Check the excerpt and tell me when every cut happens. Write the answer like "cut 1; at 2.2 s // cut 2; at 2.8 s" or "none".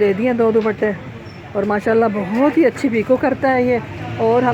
none